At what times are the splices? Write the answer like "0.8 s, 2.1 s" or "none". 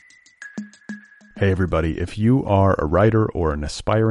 0.9 s

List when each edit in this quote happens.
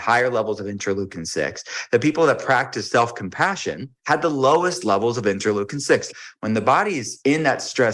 3.9 s, 6.1 s, 7.1 s

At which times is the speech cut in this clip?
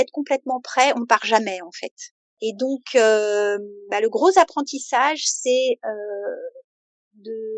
none

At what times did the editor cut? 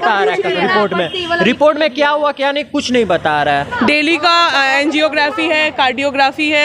3.7 s

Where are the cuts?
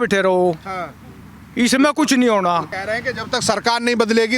none

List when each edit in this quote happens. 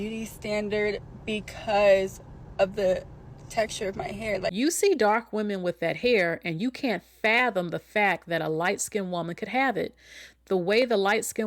4.5 s

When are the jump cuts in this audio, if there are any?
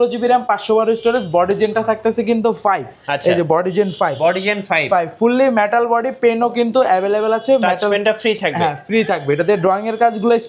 none

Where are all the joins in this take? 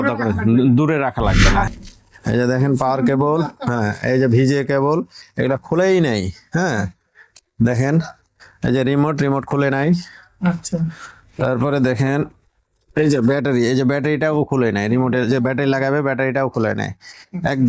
1.7 s

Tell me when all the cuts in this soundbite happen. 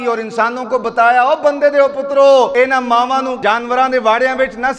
2.5 s, 3.3 s

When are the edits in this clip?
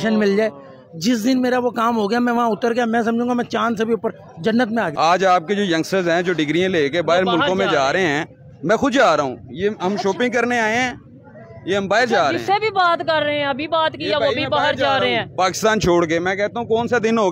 4.9 s

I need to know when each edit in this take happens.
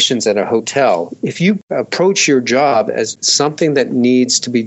3.2 s

